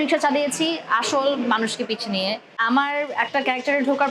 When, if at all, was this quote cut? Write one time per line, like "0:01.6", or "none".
0:02.6